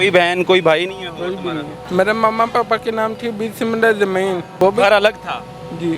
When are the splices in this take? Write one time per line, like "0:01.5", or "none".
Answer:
0:01.7
0:04.5